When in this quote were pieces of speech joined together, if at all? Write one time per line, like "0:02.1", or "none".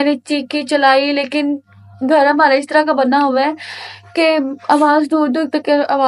none